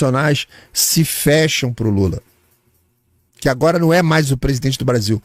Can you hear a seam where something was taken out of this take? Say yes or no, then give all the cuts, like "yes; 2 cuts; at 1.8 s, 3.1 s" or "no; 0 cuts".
no; 0 cuts